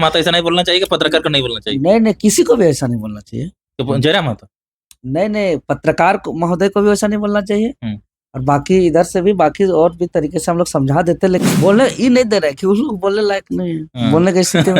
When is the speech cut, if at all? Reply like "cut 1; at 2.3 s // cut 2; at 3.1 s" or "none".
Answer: cut 1; at 11.4 s